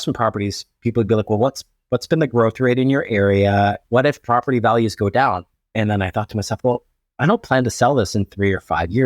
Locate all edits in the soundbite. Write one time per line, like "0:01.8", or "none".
0:03.8
0:05.6